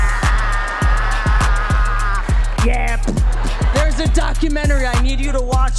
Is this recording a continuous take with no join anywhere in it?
yes; 0 cuts

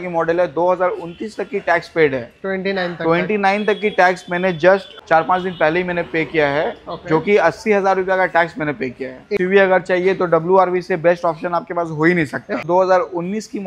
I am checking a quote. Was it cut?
yes; 3 cuts; at 4.9 s, 9.3 s, 12.6 s

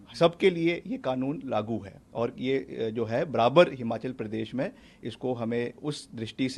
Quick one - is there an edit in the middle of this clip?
no; 0 cuts

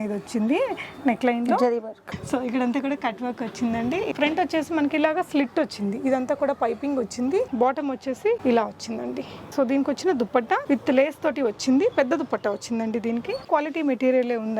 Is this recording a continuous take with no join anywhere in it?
no; 4 cuts; at 4.1 s, 7.8 s, 10.6 s, 13.5 s

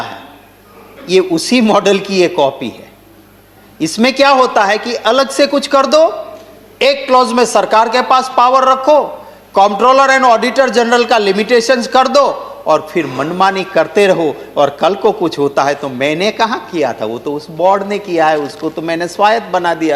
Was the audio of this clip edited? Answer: no; 0 cuts

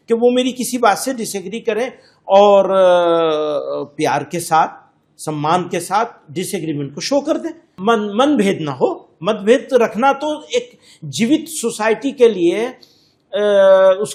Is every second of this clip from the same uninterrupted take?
yes; 0 cuts

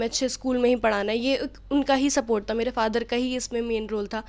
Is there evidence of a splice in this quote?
no; 0 cuts

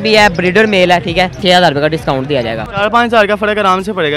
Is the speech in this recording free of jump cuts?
no; 2 cuts; at 1.4 s, 2.7 s

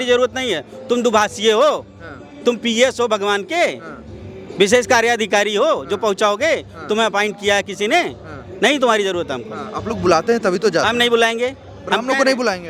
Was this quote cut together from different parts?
no; 0 cuts

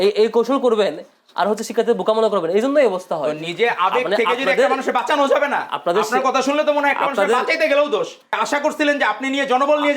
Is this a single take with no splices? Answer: no; 1 cut; at 8.2 s

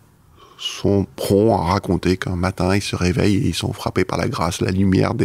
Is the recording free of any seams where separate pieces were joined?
yes; 0 cuts

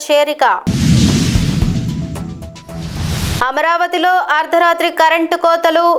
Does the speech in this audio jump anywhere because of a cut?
no; 0 cuts

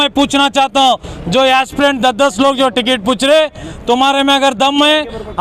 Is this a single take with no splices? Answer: yes; 0 cuts

